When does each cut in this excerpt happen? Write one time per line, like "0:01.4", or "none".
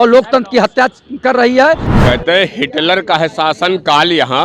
0:01.9